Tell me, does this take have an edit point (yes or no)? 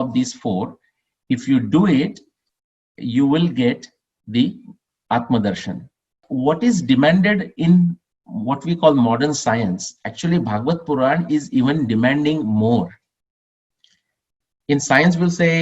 yes